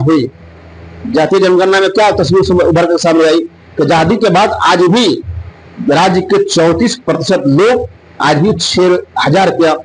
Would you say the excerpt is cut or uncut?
uncut